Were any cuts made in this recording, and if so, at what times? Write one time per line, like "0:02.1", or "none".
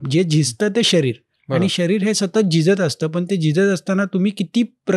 none